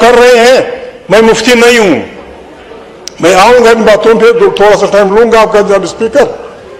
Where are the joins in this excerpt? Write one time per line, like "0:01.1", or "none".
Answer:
none